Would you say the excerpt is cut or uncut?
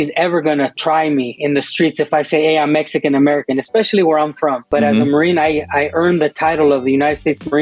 cut